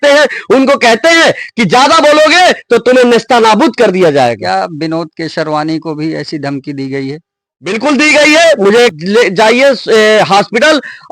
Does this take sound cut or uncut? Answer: cut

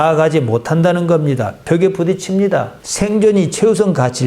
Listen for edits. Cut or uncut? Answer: cut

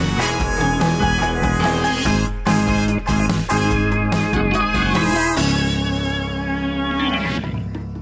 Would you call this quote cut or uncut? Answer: uncut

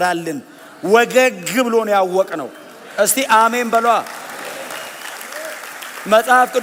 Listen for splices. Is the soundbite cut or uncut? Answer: uncut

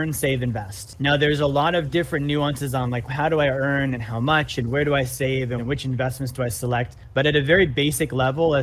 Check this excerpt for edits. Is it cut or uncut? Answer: cut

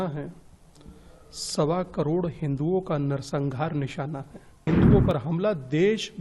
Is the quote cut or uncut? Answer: cut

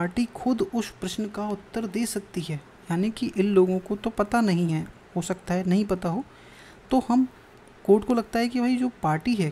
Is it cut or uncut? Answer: uncut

